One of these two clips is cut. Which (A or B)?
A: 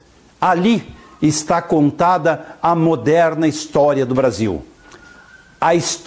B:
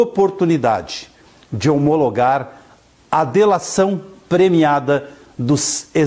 A